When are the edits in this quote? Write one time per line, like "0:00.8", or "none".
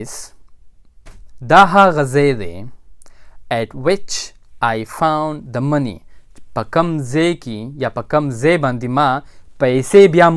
none